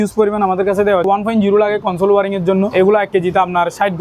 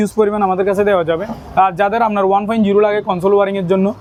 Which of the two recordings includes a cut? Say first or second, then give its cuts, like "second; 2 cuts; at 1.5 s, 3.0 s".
first; 2 cuts; at 1.1 s, 2.7 s